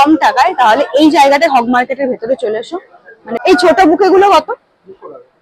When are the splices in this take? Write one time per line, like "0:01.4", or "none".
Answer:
0:03.4